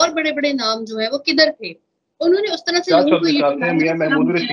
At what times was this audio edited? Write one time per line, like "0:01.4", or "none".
none